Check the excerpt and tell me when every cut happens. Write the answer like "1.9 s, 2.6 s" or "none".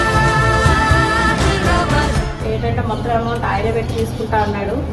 2.4 s